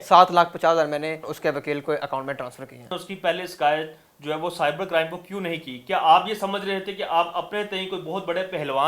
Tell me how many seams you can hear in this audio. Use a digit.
2